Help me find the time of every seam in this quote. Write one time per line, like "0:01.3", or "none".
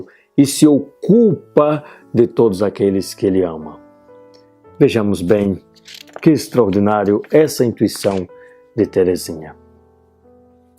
0:01.1